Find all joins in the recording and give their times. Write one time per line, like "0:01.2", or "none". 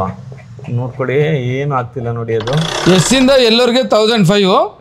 0:02.7